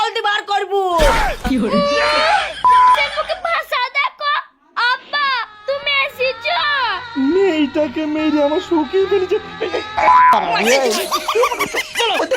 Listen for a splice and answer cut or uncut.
uncut